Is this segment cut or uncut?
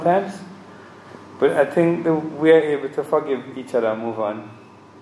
uncut